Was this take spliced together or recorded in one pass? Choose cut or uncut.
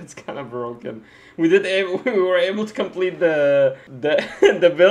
cut